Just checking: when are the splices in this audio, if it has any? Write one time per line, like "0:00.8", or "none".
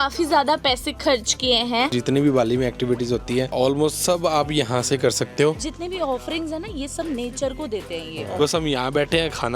0:01.9
0:05.6
0:08.4